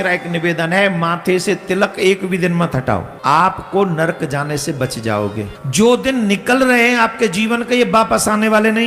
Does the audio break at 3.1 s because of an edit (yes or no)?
yes